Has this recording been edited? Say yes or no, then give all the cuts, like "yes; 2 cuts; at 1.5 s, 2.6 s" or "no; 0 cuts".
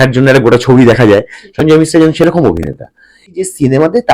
yes; 1 cut; at 3.2 s